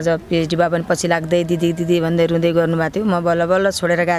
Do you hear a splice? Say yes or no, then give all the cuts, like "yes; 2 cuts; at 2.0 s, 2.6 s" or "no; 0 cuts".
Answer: no; 0 cuts